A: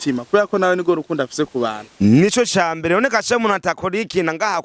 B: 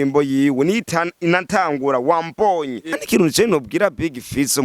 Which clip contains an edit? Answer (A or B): B